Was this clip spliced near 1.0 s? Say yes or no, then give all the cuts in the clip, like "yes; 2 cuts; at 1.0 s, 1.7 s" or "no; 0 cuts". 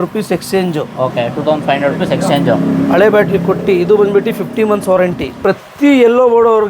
no; 1 cut; at 5.4 s